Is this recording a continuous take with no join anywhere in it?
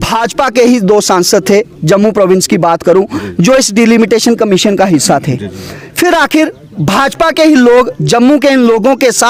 yes; 0 cuts

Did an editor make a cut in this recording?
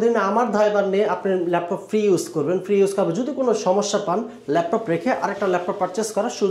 no; 0 cuts

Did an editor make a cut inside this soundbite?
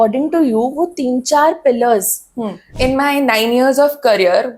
yes; 1 cut; at 2.7 s

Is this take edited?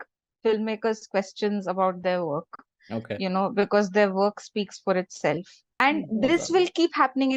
yes; 1 cut; at 5.7 s

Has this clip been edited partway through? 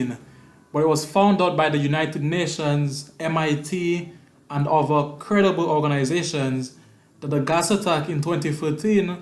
yes; 1 cut; at 3.3 s

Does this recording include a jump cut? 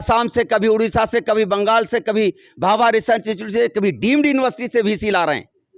no; 0 cuts

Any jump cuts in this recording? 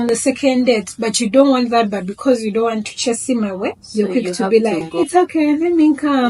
yes; 2 cuts; at 3.8 s, 4.9 s

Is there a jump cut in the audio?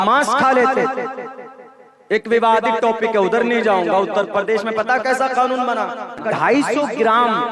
yes; 1 cut; at 6.2 s

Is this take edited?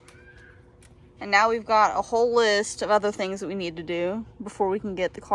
no; 0 cuts

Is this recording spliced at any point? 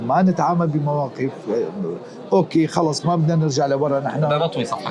no; 0 cuts

